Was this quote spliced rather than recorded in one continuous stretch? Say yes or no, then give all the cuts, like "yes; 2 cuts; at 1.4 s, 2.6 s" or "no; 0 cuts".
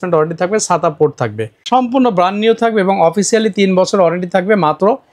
yes; 1 cut; at 1.6 s